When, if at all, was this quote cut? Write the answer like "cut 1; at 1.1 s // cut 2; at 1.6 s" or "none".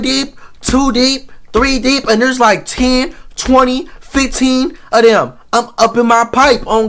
none